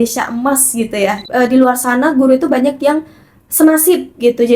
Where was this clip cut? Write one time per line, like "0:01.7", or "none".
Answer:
0:01.2